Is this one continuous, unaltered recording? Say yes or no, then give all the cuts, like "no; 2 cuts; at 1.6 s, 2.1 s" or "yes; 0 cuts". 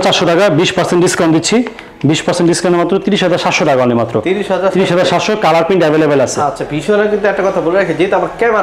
yes; 0 cuts